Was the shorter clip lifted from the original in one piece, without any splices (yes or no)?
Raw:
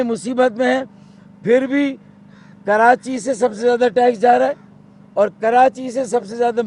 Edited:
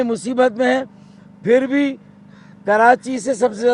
yes